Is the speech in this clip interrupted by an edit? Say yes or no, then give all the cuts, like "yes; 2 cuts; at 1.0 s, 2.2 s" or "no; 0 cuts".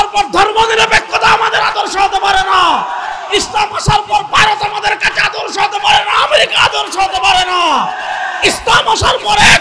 no; 0 cuts